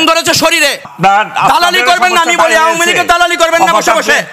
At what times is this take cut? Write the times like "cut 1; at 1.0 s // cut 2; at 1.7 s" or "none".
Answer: cut 1; at 0.9 s